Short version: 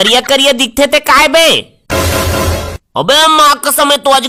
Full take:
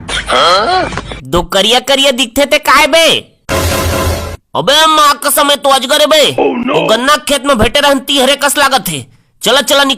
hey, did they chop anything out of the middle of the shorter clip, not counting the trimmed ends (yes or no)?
no